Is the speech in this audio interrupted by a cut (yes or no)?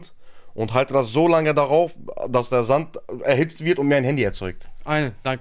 no